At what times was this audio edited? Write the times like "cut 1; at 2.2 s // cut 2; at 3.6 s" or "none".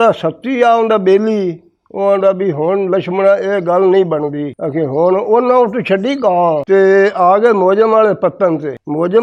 none